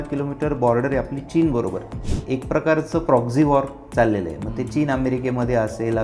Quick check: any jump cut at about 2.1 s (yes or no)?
yes